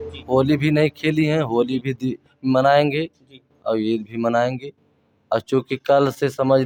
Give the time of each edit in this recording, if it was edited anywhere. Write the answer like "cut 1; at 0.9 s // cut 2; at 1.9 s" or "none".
none